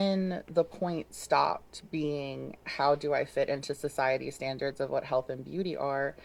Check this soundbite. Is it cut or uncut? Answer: cut